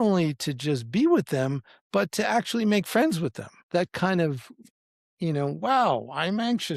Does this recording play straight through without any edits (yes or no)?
no